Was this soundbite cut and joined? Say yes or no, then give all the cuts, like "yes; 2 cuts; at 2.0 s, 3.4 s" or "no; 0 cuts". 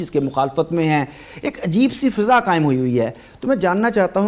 no; 0 cuts